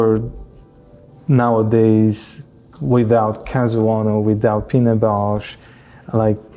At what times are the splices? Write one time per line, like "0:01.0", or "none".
none